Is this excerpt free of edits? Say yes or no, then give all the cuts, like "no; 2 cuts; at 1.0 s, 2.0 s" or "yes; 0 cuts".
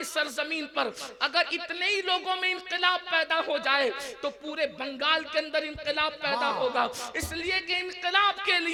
yes; 0 cuts